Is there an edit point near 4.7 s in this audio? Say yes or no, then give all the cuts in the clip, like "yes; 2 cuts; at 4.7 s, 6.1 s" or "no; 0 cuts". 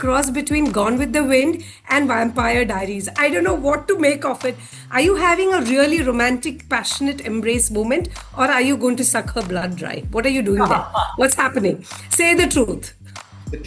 yes; 1 cut; at 4.7 s